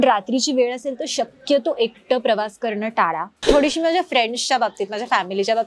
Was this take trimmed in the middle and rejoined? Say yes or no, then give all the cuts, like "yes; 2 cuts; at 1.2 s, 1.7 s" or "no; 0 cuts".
yes; 1 cut; at 3.4 s